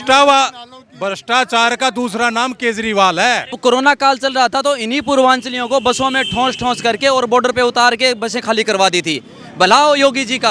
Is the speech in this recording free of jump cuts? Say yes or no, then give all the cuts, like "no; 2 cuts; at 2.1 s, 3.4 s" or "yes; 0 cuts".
no; 1 cut; at 3.6 s